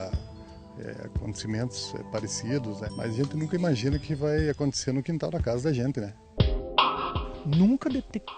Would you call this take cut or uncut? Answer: cut